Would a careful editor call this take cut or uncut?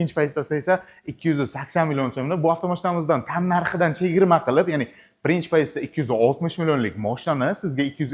uncut